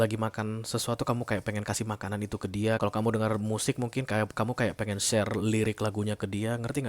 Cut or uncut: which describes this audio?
cut